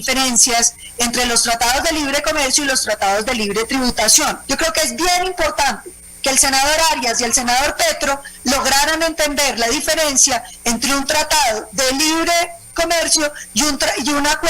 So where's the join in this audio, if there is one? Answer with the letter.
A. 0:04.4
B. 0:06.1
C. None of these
A